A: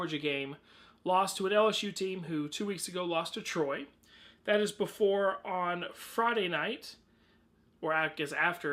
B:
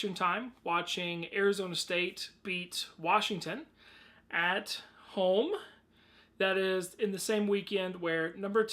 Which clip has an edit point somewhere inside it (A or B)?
B